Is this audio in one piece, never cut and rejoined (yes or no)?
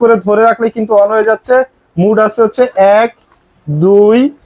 yes